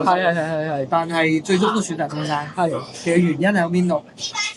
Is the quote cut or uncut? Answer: uncut